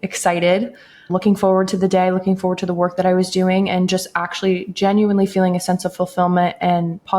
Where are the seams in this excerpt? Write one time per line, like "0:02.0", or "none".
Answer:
0:01.1